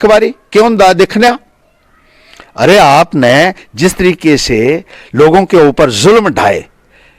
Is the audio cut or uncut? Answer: uncut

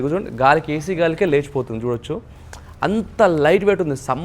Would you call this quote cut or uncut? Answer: uncut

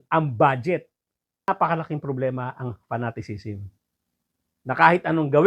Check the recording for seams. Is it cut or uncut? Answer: cut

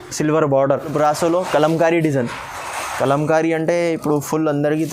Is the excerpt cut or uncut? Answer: cut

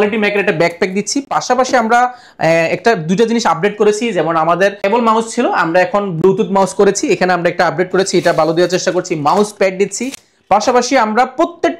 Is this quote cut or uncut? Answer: uncut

